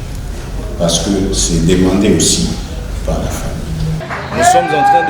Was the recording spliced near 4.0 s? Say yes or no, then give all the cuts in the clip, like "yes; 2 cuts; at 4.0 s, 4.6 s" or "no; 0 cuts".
yes; 1 cut; at 4.0 s